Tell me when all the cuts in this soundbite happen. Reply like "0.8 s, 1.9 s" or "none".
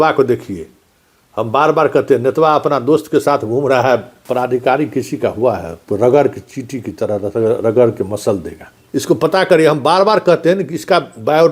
4.2 s, 8.8 s